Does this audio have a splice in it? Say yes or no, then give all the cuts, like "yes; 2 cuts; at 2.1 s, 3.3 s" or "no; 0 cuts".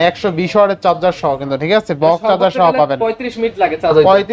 no; 0 cuts